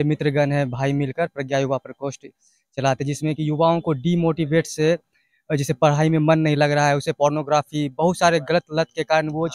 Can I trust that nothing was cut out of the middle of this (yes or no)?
yes